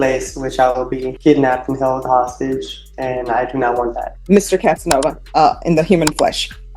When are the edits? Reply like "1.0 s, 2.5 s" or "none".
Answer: 1.1 s, 4.1 s, 5.2 s

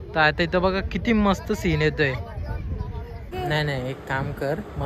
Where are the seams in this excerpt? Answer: 3.3 s

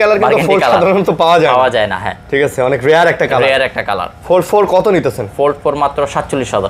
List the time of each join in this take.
none

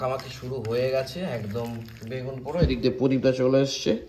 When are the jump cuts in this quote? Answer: none

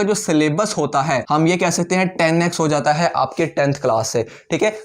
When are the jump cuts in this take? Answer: 1.2 s

